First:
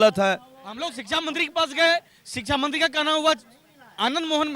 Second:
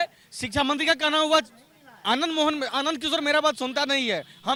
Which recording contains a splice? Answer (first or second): first